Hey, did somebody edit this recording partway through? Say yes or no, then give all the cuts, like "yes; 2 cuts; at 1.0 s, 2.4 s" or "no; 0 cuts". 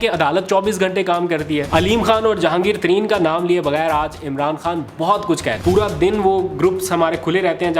yes; 2 cuts; at 1.7 s, 5.6 s